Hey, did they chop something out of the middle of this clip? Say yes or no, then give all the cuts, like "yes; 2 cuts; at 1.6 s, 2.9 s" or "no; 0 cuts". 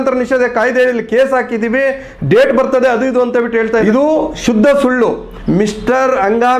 yes; 2 cuts; at 3.9 s, 5.3 s